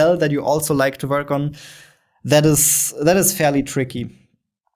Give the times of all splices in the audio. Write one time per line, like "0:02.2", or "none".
none